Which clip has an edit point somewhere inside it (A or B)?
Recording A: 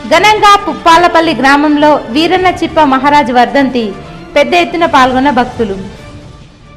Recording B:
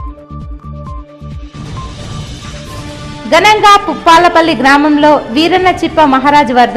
B